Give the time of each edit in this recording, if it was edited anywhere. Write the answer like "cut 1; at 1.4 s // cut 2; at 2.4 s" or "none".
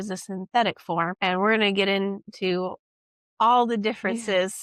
cut 1; at 1.1 s